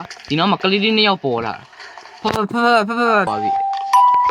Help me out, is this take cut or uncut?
cut